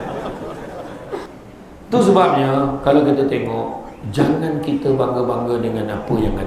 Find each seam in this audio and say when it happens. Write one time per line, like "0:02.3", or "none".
0:01.2

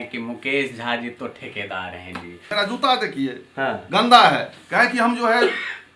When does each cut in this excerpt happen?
0:02.5

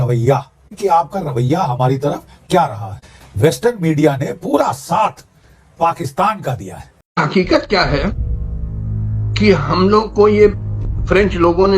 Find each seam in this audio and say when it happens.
0:07.1

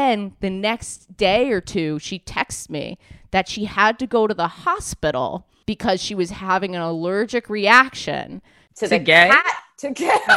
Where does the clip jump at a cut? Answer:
0:05.5

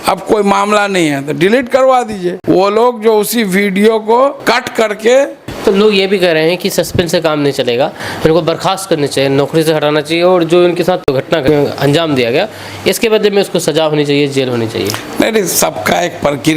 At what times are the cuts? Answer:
0:02.3
0:04.4
0:05.5

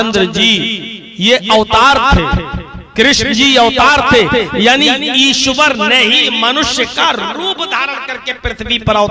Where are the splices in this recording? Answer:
none

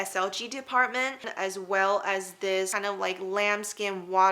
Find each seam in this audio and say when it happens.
0:01.3

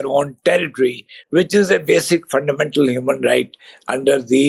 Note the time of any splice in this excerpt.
none

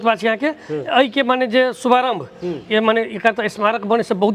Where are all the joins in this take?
none

